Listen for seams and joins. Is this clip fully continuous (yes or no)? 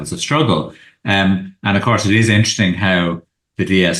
yes